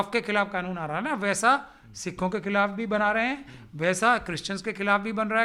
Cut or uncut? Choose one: uncut